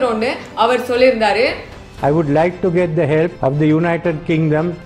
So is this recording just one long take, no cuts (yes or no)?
no